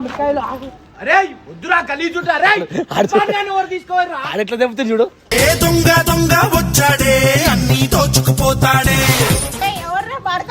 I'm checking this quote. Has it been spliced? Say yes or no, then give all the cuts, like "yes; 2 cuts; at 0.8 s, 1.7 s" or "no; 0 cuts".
yes; 1 cut; at 9.6 s